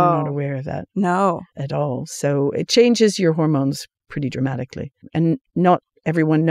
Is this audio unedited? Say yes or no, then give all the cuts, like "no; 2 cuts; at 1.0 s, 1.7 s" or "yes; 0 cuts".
no; 2 cuts; at 1.5 s, 5.0 s